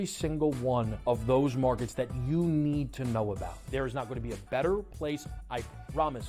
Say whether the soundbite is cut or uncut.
cut